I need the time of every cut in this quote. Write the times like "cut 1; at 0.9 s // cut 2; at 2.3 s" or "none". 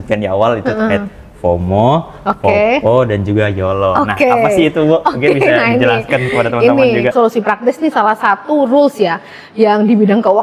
cut 1; at 7.1 s